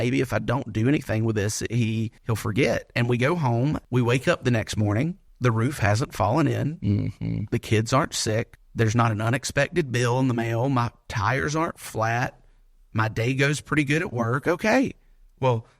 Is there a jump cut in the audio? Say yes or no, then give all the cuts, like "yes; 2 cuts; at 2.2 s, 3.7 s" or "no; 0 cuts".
yes; 4 cuts; at 2.2 s, 3.8 s, 5.3 s, 8.6 s